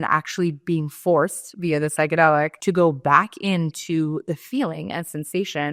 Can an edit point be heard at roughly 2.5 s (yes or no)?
yes